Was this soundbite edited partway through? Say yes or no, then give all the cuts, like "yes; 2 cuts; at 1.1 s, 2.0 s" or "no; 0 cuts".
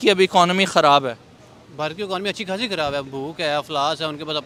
no; 0 cuts